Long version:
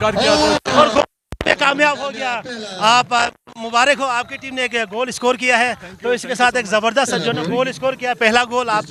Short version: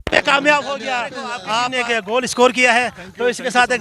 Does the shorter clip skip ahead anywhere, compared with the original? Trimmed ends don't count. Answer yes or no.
yes